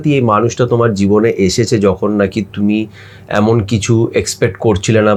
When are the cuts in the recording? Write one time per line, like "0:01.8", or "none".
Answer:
none

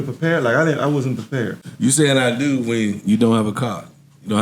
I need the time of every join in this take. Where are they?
0:01.6

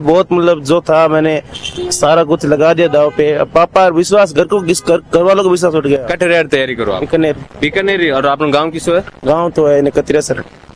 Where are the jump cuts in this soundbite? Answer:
none

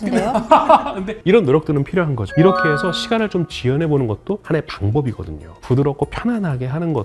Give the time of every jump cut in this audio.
none

